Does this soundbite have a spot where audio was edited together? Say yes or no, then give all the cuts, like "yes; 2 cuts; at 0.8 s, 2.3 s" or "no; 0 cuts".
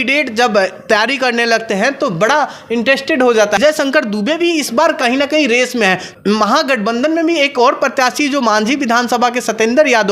yes; 2 cuts; at 3.6 s, 6.1 s